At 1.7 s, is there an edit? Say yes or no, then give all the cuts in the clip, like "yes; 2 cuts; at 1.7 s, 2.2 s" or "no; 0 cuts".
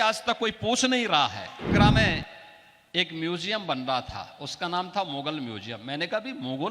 yes; 1 cut; at 1.7 s